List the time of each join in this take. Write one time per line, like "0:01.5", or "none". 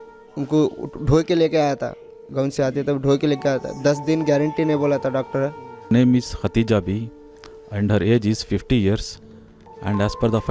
0:05.9